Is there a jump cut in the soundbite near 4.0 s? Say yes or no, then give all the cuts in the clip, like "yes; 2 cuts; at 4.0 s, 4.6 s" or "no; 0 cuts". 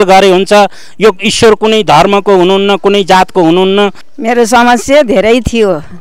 yes; 1 cut; at 4.0 s